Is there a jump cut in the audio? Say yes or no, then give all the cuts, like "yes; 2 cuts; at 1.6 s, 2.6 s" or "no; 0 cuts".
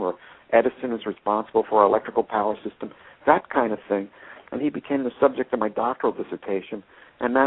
yes; 1 cut; at 1.5 s